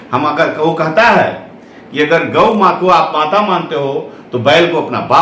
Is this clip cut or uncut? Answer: uncut